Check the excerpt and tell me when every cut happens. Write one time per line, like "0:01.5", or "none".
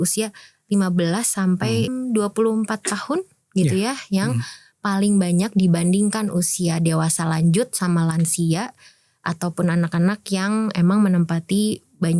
0:01.9